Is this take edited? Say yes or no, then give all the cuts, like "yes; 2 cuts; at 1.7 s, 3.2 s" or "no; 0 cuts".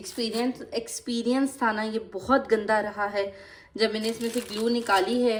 no; 0 cuts